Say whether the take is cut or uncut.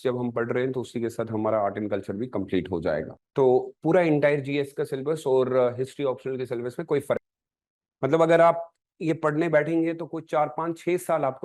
cut